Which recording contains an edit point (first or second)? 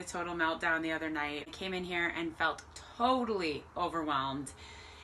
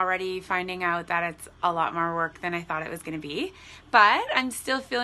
first